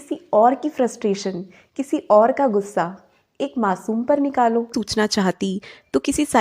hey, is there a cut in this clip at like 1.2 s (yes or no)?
no